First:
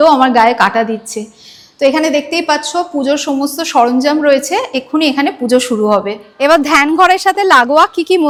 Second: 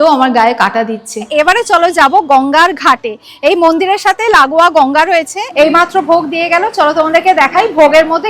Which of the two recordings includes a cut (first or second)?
second